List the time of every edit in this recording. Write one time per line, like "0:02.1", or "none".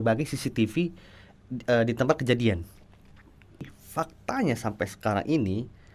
0:03.8